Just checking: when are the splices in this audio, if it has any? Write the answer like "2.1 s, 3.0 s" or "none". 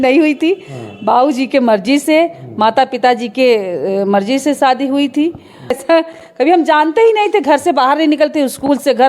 5.8 s